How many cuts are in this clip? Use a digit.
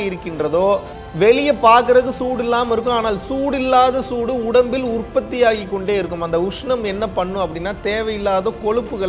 1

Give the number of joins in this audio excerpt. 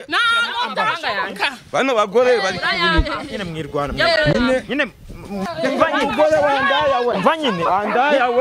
1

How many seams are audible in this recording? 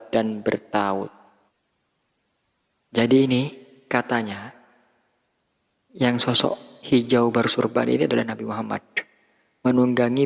1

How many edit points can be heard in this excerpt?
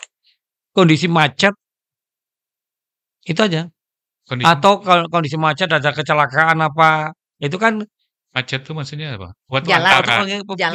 0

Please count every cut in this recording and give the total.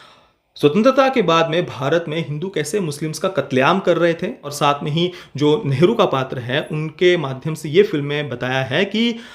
1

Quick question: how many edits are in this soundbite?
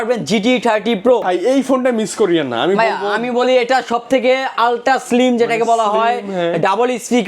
1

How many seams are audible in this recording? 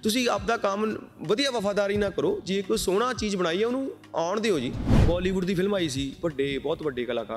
1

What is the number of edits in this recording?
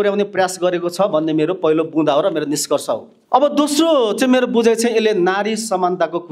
1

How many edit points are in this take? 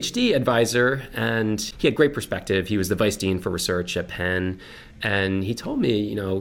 1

